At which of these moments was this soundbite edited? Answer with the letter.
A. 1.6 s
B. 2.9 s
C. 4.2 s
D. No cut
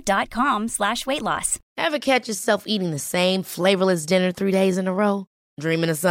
A